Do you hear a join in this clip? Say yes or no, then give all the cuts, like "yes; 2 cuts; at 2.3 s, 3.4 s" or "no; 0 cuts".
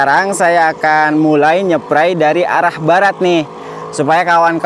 no; 0 cuts